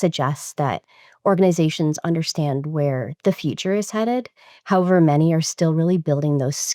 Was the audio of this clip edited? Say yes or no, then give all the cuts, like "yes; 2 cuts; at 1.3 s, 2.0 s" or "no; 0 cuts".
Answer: no; 0 cuts